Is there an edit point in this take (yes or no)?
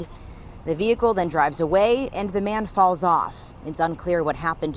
no